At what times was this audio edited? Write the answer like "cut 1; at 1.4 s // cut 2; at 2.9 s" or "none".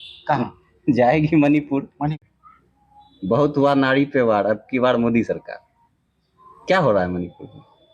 cut 1; at 2.3 s